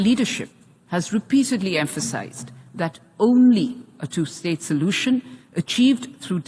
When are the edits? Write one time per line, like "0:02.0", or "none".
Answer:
none